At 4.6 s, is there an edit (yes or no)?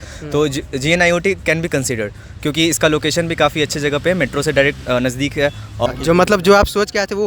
no